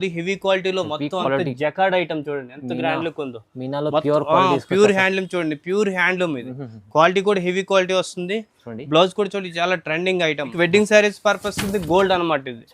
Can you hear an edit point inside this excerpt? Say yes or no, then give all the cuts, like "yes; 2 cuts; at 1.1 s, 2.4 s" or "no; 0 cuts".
yes; 1 cut; at 10.5 s